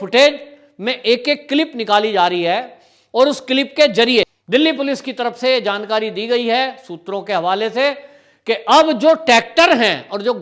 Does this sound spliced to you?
yes; 1 cut; at 4.4 s

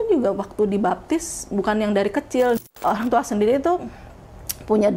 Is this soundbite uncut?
no; 1 cut; at 2.8 s

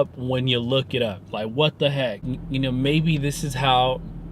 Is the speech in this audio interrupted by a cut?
yes; 1 cut; at 2.2 s

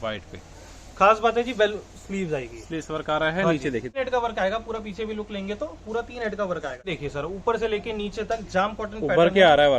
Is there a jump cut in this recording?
yes; 2 cuts; at 3.9 s, 6.9 s

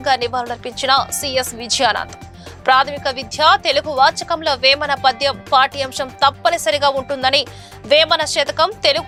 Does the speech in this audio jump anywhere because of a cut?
no; 0 cuts

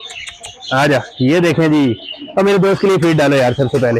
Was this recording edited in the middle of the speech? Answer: no; 0 cuts

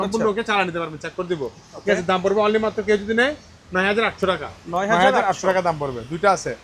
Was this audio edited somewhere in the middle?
no; 0 cuts

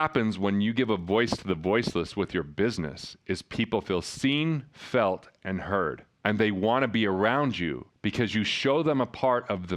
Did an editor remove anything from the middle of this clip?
no; 0 cuts

